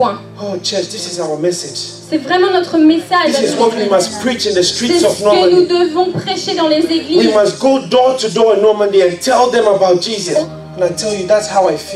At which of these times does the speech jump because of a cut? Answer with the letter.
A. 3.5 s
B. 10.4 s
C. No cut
B